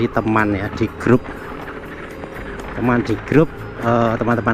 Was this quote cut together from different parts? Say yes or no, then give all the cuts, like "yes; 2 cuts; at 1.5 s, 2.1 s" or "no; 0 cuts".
no; 0 cuts